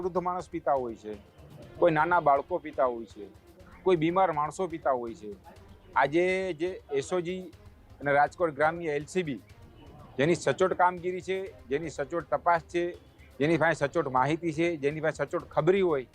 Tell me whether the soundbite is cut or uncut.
uncut